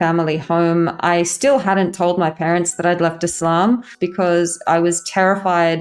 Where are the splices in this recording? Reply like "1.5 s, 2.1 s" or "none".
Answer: 4.0 s